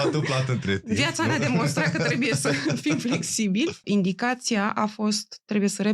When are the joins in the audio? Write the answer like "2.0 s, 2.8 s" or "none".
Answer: 3.8 s